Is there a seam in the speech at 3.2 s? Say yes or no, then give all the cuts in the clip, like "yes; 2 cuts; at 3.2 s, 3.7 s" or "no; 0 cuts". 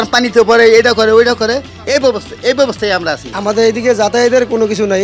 yes; 1 cut; at 3.2 s